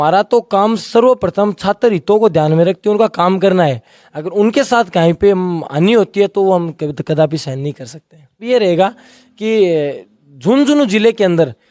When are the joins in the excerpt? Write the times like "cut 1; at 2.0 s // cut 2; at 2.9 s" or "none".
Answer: cut 1; at 8.4 s